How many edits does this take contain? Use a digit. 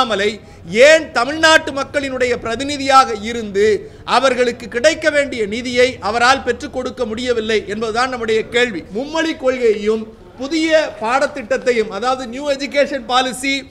1